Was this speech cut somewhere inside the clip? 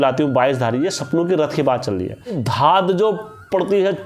yes; 1 cut; at 2.4 s

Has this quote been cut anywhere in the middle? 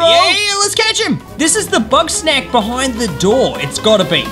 no; 0 cuts

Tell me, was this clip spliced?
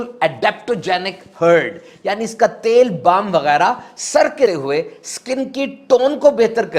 yes; 1 cut; at 4.5 s

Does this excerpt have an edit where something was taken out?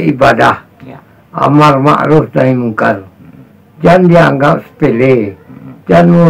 no; 0 cuts

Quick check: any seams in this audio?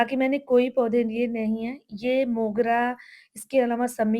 no; 0 cuts

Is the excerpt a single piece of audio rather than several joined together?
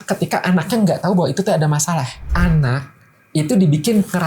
no; 1 cut; at 2.2 s

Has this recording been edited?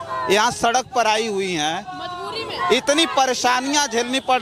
no; 0 cuts

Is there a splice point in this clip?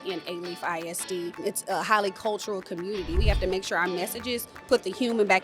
yes; 2 cuts; at 1.4 s, 3.2 s

